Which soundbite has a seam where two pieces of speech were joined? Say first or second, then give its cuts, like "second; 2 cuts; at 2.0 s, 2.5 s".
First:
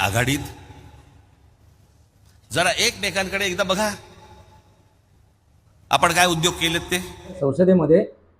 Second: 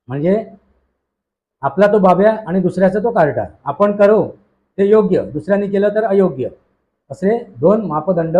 first; 1 cut; at 7.4 s